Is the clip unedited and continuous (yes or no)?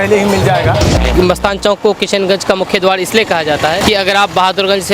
no